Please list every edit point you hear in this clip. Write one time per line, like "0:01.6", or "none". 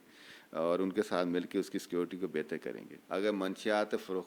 0:02.9